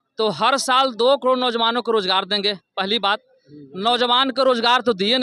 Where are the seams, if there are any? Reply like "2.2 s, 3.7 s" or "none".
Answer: none